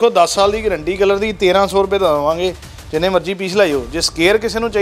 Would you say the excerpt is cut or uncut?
uncut